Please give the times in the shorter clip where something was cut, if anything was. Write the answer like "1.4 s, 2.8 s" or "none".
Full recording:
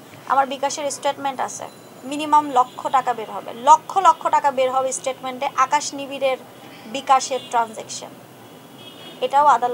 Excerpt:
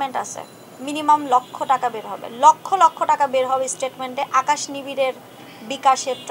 none